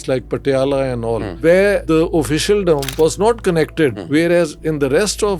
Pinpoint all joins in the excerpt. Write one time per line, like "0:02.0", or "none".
0:01.3
0:01.8
0:02.9
0:04.0